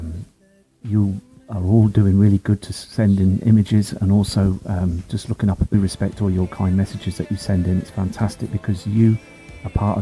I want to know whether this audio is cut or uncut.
uncut